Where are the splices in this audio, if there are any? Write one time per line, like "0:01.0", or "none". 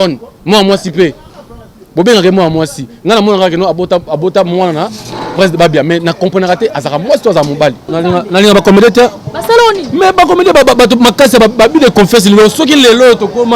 0:07.9